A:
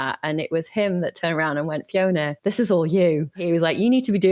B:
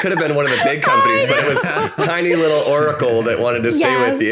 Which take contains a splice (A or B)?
A